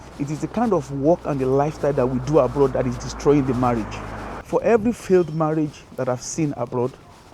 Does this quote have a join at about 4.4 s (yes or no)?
yes